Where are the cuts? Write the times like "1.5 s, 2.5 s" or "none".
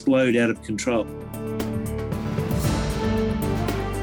1.2 s